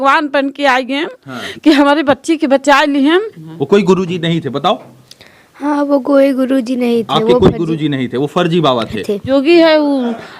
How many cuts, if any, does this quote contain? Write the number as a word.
two